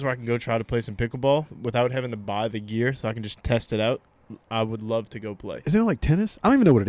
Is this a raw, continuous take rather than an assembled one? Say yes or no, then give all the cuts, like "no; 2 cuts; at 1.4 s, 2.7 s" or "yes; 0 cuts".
yes; 0 cuts